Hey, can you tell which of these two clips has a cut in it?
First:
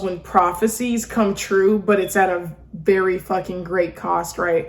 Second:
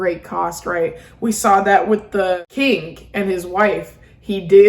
second; 1 cut; at 2.4 s

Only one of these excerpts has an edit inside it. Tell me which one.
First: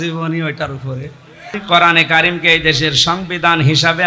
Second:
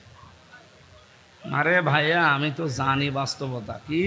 first; 1 cut; at 1.6 s

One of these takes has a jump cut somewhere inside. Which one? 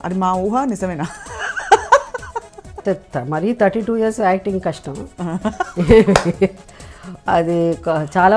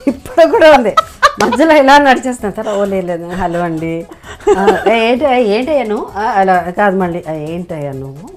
first; 1 cut; at 2.8 s

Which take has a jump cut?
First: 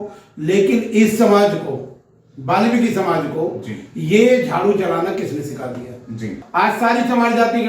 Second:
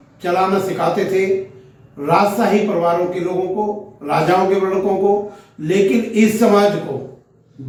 first; 1 cut; at 6.4 s

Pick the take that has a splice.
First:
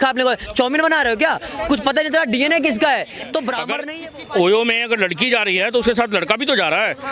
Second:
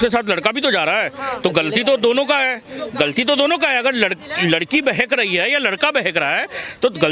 first; 1 cut; at 3.7 s

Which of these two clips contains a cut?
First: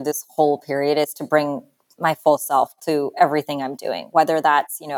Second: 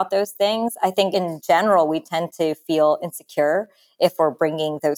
second; 1 cut; at 1.1 s

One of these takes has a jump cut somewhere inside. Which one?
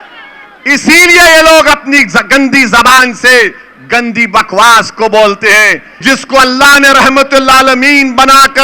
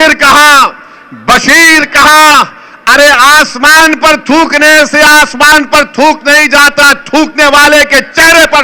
first; 1 cut; at 6.0 s

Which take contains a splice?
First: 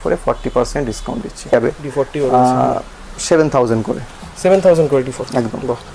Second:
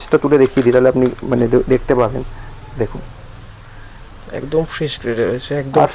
first; 1 cut; at 1.5 s

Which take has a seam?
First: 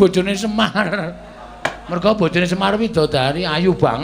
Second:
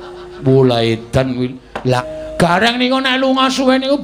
second; 1 cut; at 2.0 s

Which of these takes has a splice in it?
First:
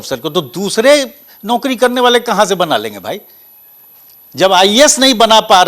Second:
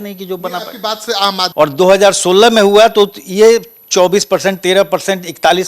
second; 1 cut; at 1.5 s

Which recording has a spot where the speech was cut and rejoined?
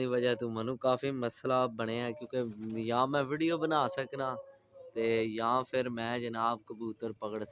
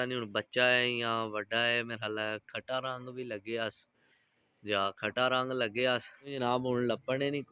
second; 1 cut; at 6.3 s

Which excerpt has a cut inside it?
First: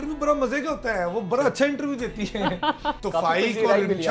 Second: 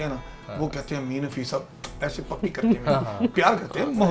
first; 1 cut; at 3.0 s

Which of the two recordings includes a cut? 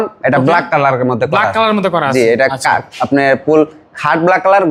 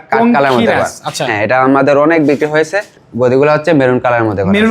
second; 1 cut; at 3.0 s

